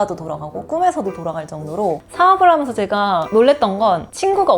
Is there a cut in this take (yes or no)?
yes